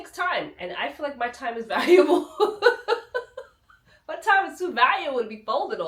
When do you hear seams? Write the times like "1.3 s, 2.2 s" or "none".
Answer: none